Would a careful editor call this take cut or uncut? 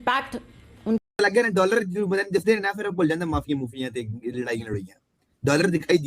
cut